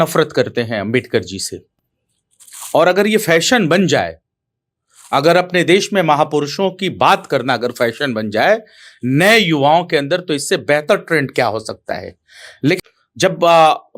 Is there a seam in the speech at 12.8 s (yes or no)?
yes